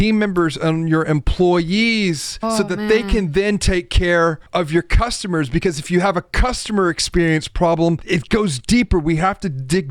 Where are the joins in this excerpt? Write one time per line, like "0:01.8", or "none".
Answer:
0:02.3
0:04.4
0:08.0